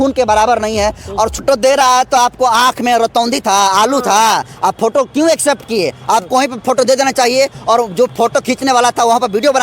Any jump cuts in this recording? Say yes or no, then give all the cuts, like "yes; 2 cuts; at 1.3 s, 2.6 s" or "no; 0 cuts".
yes; 1 cut; at 1.4 s